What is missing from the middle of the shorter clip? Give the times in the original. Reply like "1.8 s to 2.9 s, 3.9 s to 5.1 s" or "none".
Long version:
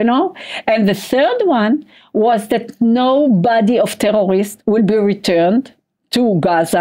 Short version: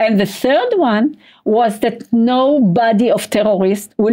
none